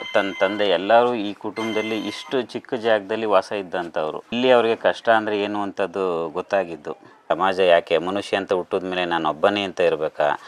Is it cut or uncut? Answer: cut